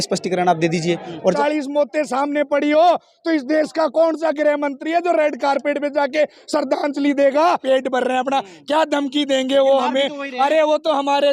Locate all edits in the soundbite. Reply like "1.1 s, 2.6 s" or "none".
1.3 s, 7.6 s